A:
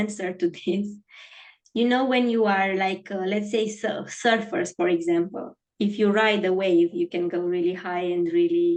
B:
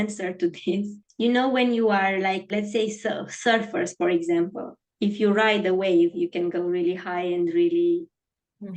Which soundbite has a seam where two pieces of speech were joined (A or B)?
B